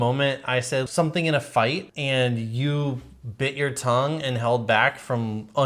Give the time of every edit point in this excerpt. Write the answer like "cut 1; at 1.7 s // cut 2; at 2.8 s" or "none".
cut 1; at 0.9 s // cut 2; at 1.9 s